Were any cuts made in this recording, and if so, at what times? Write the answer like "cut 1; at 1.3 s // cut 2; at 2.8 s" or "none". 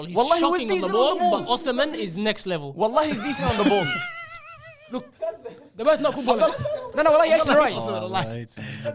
none